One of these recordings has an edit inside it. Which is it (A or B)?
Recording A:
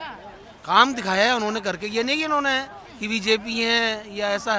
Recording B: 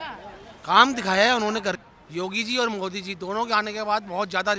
B